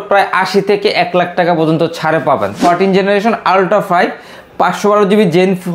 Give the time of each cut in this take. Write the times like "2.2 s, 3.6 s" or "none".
2.6 s